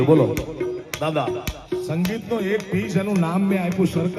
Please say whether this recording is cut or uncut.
uncut